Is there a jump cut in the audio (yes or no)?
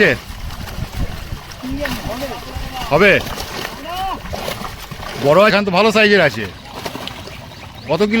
yes